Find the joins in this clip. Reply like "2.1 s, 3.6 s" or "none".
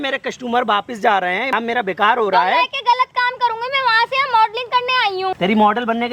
1.5 s, 5.3 s

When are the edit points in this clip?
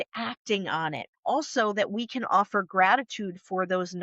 1.1 s

